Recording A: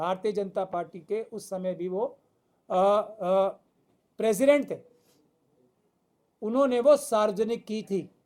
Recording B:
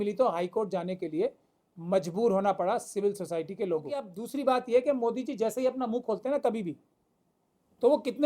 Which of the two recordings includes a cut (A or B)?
B